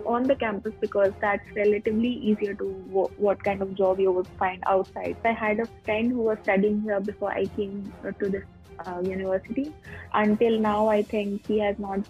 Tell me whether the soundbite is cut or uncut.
cut